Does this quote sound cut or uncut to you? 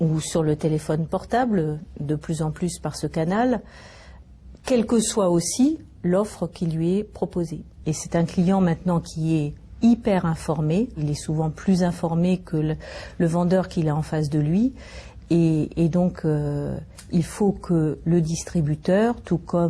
cut